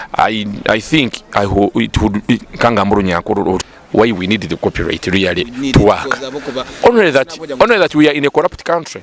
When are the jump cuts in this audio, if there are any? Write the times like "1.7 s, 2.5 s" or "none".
3.7 s